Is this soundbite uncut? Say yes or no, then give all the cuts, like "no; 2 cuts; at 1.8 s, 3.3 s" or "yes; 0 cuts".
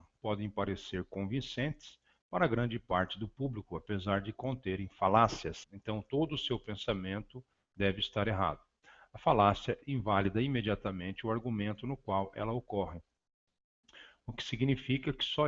yes; 0 cuts